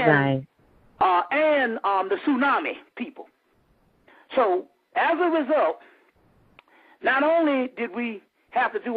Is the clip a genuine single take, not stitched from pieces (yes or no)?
no